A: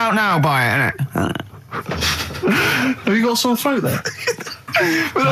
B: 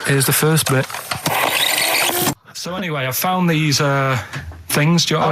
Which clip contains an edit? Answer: B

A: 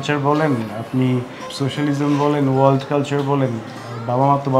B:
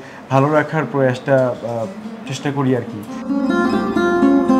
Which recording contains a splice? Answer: B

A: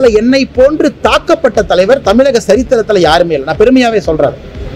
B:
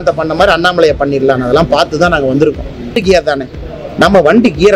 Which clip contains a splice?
B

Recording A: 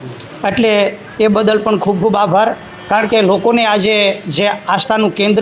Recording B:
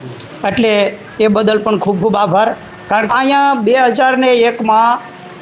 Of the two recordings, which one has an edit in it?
B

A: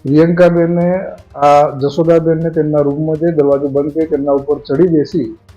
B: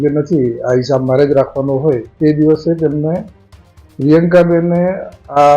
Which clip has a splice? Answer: B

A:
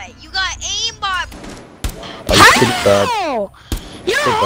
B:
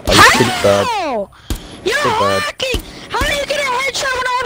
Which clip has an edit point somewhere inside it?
A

